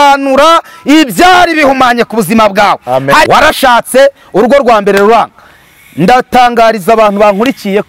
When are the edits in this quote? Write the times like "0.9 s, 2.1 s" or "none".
3.3 s